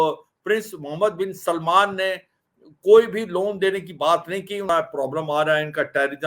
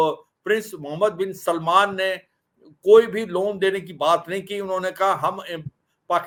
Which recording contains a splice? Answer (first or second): first